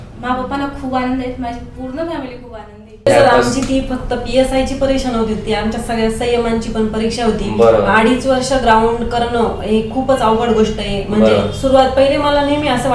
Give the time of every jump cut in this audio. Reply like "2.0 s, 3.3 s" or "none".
3.1 s